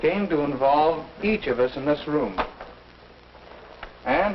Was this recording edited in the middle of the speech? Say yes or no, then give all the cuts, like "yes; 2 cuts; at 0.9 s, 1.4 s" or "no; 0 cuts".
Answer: yes; 1 cut; at 2.1 s